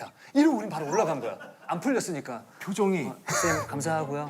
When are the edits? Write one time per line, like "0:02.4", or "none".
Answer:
0:01.6